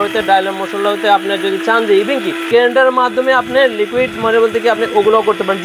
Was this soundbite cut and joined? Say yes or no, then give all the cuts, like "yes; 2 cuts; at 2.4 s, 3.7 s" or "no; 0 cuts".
yes; 1 cut; at 2.5 s